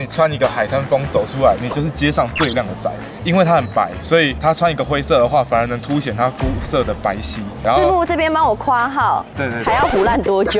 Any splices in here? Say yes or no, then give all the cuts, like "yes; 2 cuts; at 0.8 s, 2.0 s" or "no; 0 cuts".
no; 0 cuts